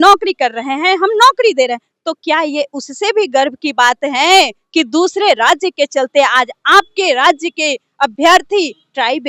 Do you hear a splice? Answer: no; 0 cuts

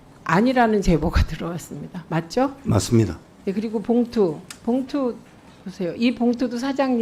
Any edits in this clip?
no; 0 cuts

